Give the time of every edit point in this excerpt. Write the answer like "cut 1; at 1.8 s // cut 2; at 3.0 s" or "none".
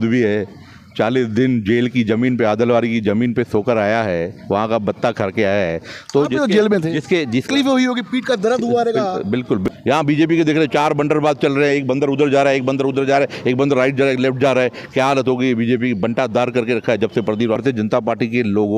cut 1; at 7.5 s // cut 2; at 9.6 s // cut 3; at 17.6 s